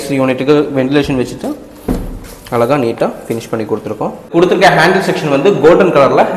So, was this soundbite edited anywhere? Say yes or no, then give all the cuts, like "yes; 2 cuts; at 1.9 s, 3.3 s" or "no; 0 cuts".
yes; 1 cut; at 4.3 s